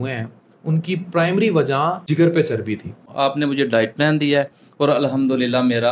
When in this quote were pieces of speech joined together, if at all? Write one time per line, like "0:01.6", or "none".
0:02.0
0:03.1